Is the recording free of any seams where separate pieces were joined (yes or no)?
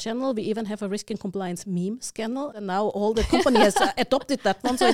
no